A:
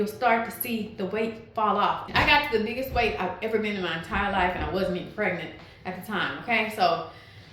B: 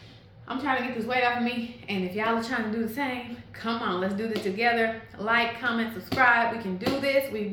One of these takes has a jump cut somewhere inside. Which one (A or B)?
A